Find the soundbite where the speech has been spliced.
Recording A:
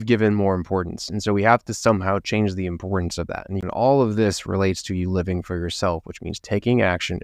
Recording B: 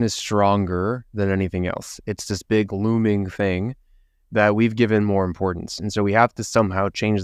A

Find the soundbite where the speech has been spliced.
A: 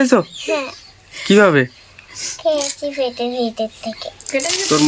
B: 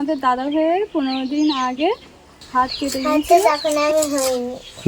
B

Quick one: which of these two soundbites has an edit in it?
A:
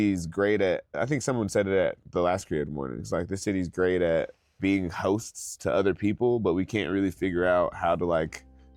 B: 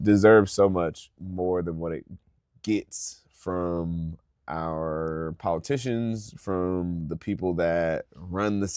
A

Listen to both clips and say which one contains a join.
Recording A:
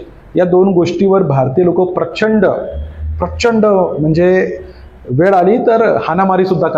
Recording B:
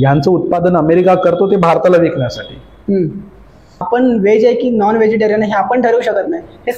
B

